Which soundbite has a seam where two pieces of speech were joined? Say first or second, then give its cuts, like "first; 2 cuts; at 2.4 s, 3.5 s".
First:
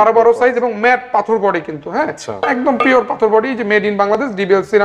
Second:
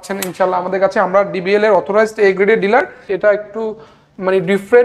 second; 1 cut; at 3.0 s